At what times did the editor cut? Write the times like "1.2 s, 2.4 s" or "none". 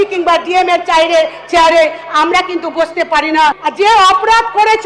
3.6 s